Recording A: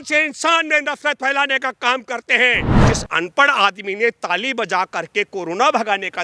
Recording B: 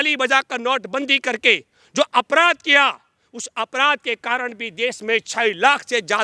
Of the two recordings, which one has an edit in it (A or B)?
A